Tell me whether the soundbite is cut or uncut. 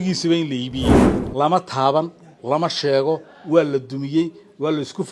cut